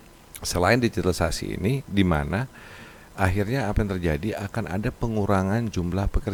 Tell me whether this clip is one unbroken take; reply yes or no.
yes